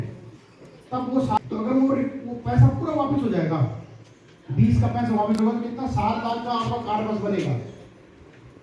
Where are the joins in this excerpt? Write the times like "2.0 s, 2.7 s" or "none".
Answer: 1.3 s